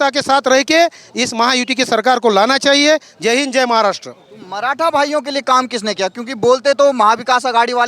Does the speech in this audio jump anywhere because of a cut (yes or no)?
no